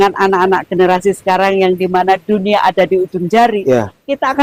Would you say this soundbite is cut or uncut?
uncut